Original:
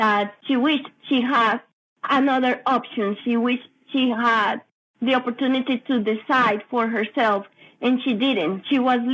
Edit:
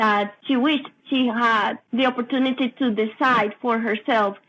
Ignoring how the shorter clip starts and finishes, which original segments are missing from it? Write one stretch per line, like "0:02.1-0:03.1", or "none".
0:00.9-0:03.8
0:04.6-0:04.9